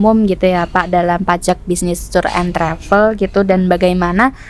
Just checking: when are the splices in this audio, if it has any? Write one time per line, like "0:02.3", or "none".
none